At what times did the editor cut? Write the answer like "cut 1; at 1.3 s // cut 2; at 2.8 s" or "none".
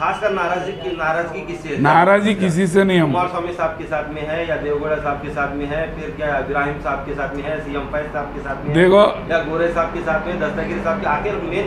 none